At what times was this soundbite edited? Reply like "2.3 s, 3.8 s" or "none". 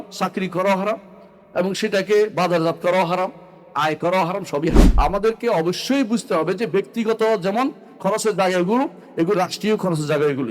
4.9 s